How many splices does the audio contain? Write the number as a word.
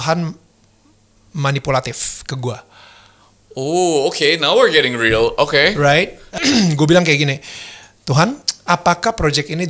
two